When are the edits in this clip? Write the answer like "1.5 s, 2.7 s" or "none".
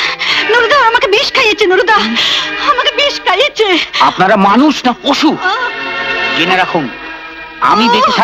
none